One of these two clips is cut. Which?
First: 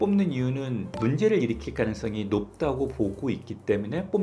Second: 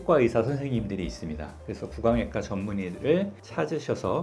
first; 1 cut; at 1.0 s

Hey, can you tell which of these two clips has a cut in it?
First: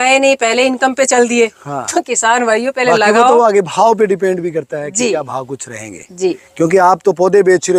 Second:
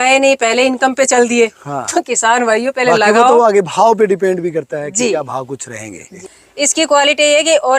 second; 1 cut; at 6.1 s

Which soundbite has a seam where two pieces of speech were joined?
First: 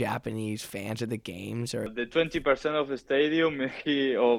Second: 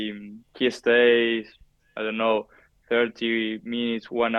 first; 1 cut; at 1.9 s

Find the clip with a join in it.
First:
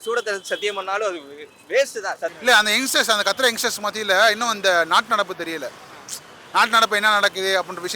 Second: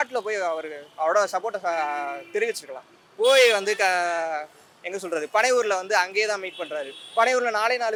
first; 1 cut; at 2.4 s

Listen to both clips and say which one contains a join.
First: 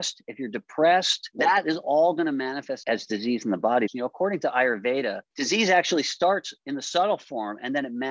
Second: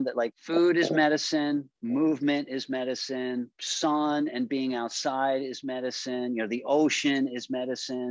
first; 4 cuts; at 1.2 s, 2.8 s, 3.9 s, 5.3 s

